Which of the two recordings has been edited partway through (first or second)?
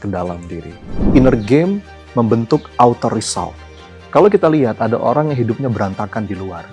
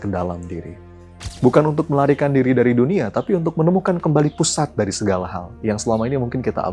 first